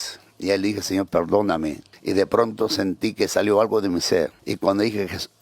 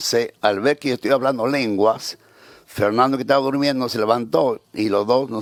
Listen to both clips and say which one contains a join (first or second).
first